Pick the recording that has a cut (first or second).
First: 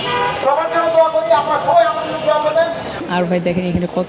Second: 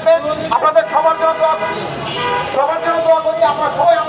first